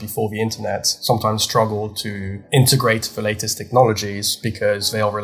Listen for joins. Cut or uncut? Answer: cut